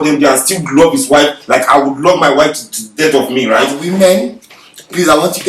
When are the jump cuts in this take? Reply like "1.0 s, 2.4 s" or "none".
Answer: 3.8 s